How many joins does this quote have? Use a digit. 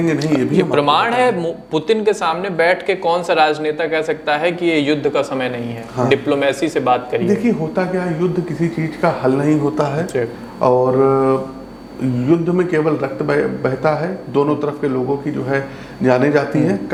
0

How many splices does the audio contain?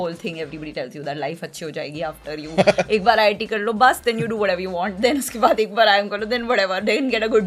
0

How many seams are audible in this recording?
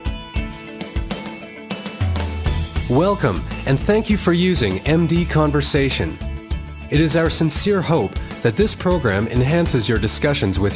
0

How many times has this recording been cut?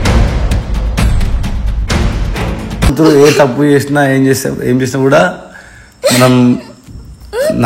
1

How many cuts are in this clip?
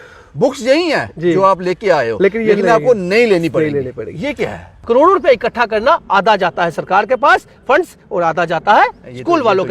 1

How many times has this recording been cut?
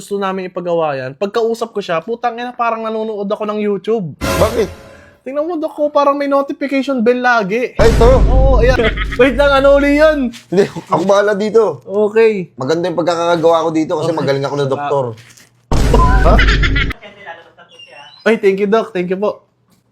2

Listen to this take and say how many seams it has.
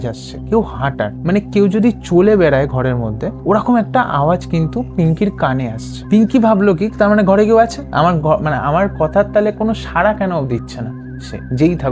0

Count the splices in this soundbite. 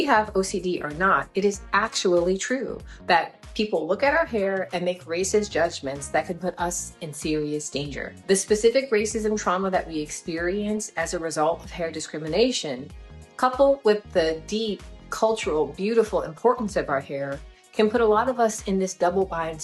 1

